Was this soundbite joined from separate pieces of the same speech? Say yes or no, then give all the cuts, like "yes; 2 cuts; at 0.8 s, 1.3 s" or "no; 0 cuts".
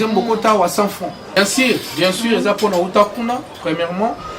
yes; 1 cut; at 1.4 s